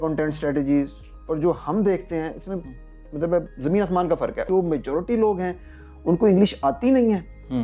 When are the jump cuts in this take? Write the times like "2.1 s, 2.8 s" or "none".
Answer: 4.4 s